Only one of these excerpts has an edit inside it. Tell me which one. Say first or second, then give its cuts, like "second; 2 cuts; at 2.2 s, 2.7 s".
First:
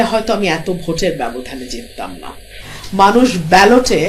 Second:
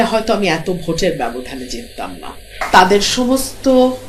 second; 1 cut; at 2.6 s